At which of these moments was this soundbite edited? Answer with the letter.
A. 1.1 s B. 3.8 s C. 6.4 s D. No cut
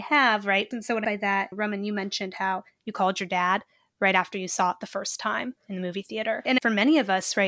C